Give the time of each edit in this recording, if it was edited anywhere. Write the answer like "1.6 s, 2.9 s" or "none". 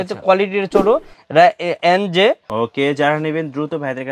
2.5 s